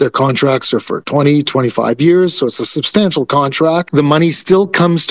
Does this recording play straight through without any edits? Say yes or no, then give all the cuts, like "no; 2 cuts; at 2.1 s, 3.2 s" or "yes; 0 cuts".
no; 1 cut; at 3.9 s